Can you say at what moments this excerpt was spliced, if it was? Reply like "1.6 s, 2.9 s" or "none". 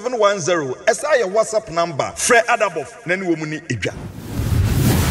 3.9 s